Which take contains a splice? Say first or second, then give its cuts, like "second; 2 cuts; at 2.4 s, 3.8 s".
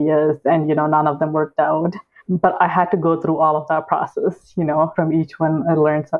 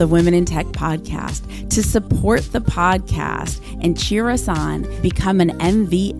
first; 2 cuts; at 2.2 s, 4.9 s